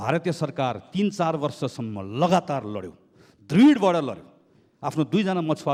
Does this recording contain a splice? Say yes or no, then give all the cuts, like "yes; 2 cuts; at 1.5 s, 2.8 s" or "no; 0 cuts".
no; 0 cuts